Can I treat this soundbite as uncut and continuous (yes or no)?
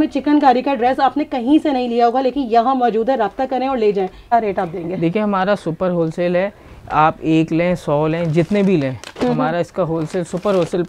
no